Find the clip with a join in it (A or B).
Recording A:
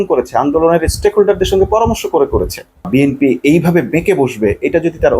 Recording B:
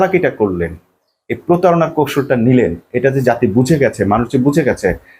A